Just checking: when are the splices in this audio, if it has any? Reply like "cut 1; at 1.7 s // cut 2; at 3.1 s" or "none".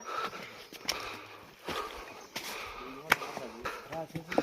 none